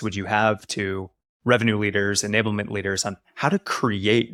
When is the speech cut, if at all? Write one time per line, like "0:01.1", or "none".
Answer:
none

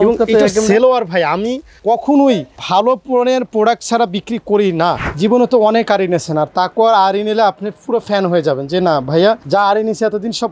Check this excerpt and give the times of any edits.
0:01.7
0:02.5
0:05.1
0:09.4

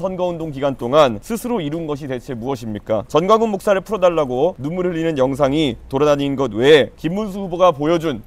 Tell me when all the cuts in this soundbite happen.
0:01.2
0:03.1
0:04.6
0:07.0

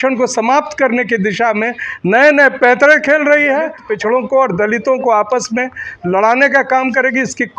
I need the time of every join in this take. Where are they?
0:03.8

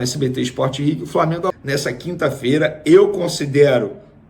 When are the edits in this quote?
0:01.5

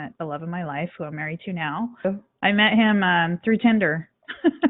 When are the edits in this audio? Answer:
0:02.0

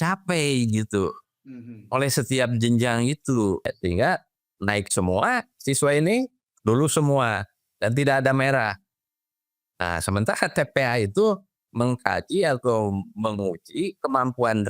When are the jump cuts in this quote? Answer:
0:03.6

